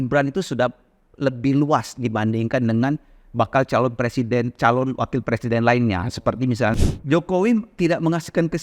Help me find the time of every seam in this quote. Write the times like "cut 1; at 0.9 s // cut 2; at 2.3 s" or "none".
cut 1; at 6.7 s